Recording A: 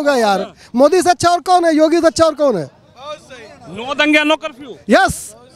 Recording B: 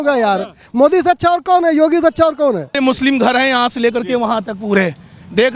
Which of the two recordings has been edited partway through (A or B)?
B